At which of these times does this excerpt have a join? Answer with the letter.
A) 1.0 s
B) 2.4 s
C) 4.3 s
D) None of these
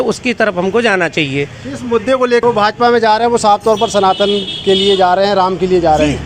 B